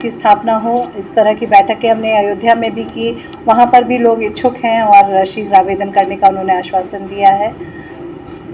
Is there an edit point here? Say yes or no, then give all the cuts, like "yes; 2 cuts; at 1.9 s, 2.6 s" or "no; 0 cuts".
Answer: no; 0 cuts